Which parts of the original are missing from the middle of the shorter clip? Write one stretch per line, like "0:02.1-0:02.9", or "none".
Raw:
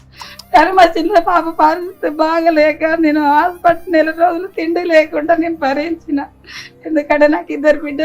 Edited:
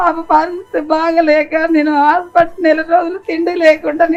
none